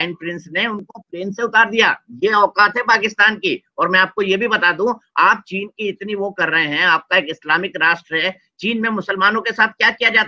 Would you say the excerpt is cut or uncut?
uncut